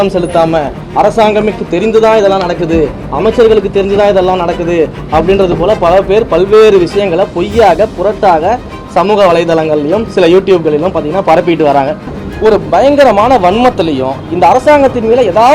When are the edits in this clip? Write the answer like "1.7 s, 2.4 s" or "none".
12.2 s